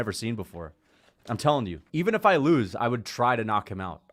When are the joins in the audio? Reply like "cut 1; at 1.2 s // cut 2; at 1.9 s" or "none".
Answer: cut 1; at 1.8 s

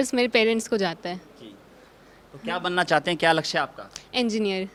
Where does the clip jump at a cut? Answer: none

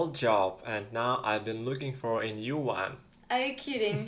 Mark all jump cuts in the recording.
cut 1; at 2.9 s

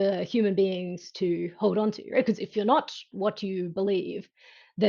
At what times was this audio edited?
cut 1; at 2.5 s

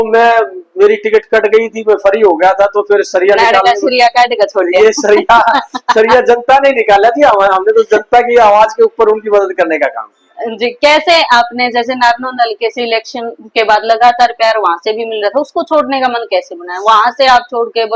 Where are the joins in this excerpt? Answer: none

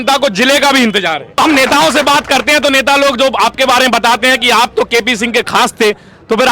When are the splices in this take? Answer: cut 1; at 1.4 s

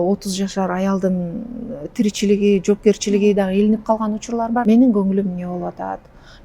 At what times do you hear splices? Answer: cut 1; at 4.6 s

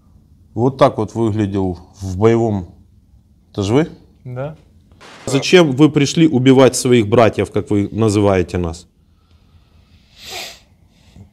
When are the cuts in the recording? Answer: cut 1; at 5.3 s

